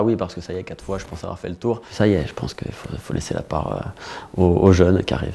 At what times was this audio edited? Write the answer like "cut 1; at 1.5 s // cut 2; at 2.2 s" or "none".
cut 1; at 1.9 s